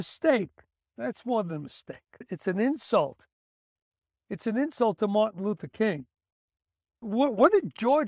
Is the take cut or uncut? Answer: uncut